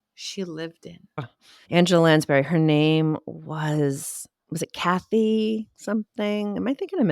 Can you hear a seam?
yes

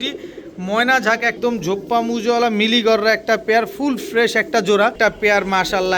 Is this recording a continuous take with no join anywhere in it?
no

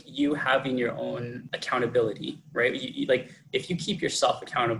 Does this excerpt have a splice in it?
yes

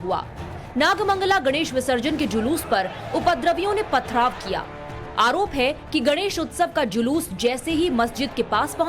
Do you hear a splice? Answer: yes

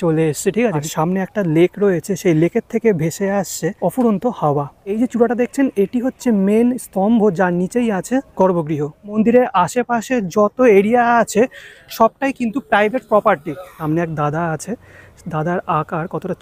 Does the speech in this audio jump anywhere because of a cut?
yes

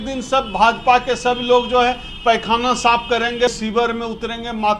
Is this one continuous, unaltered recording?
no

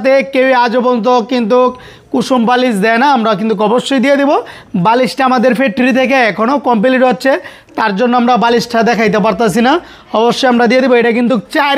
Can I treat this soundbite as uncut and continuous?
yes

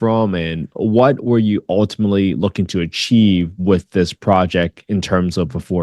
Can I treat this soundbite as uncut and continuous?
yes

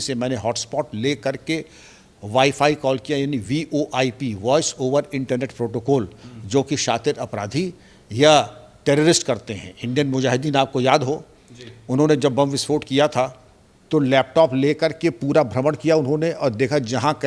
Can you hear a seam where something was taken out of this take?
no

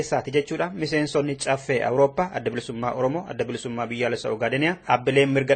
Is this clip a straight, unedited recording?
yes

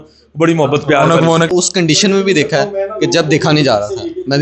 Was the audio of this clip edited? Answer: yes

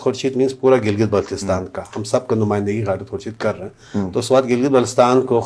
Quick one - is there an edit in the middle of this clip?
no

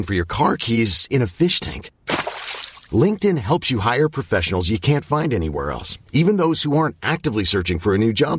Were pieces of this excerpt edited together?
no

